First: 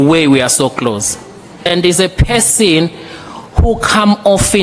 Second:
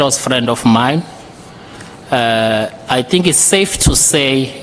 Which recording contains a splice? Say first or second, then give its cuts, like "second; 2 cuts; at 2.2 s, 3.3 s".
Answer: first; 1 cut; at 1.6 s